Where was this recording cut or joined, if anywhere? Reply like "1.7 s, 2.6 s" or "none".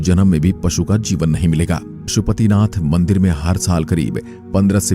2.1 s